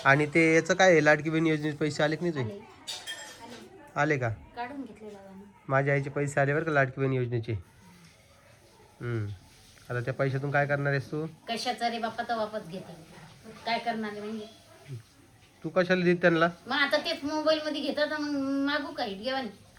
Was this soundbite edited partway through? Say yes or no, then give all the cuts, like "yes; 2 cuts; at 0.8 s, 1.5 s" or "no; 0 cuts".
no; 0 cuts